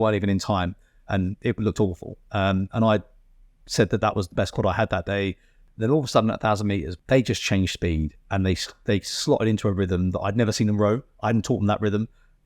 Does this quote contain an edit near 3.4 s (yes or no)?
no